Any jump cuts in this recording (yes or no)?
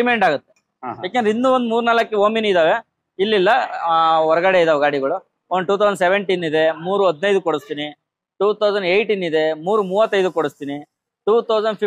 no